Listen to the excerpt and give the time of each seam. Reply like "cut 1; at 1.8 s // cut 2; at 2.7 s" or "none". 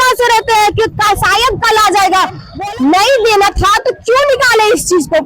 cut 1; at 2.5 s